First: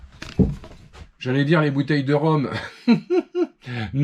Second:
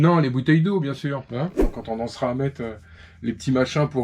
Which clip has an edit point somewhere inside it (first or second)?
second